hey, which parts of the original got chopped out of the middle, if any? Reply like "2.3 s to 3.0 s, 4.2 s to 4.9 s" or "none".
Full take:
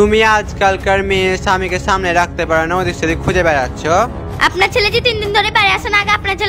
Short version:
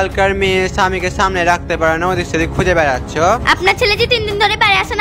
4.1 s to 4.4 s